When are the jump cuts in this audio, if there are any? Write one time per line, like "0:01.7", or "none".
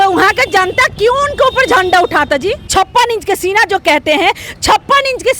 0:02.7